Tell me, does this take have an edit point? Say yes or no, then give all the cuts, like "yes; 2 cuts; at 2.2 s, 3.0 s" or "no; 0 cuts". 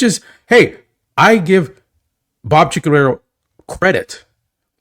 no; 0 cuts